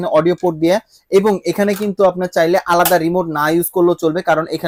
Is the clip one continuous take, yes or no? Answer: yes